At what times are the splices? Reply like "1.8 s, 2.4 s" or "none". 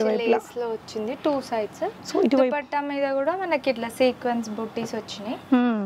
none